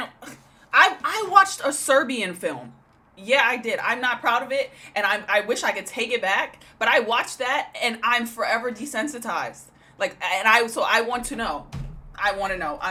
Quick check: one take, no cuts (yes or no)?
yes